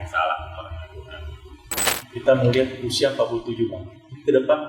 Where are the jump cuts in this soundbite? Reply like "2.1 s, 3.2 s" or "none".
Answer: 1.9 s